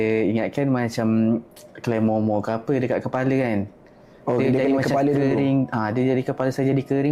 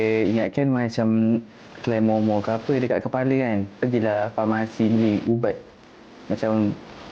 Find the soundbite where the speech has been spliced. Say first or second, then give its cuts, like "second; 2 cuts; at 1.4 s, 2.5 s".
second; 1 cut; at 3.7 s